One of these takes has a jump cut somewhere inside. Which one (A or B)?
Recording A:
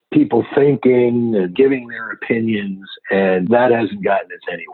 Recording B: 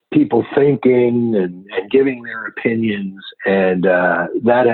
A